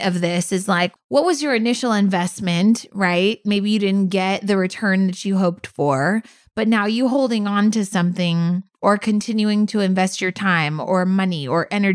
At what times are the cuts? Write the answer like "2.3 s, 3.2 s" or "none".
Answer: 1.0 s